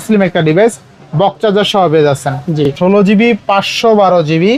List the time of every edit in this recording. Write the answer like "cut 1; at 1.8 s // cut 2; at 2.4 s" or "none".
cut 1; at 2.7 s